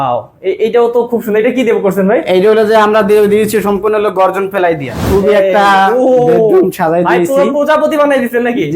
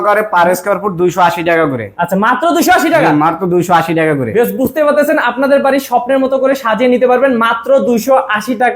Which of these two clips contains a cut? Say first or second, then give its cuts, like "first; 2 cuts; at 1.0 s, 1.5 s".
first; 1 cut; at 5.0 s